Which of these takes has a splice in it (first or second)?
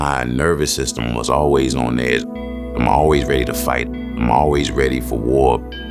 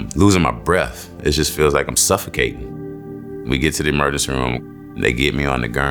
second